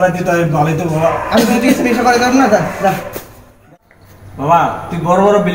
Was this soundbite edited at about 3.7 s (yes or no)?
yes